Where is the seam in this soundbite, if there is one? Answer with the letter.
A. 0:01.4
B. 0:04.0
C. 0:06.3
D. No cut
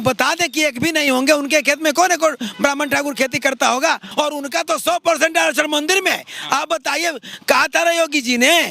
B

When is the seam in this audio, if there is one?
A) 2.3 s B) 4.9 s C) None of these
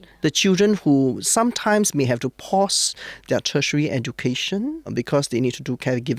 B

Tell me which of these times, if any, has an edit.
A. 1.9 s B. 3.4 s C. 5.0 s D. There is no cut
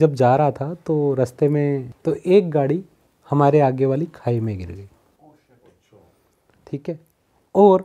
A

